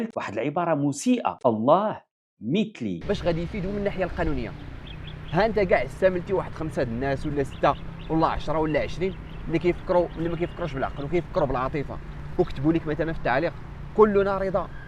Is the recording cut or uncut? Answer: cut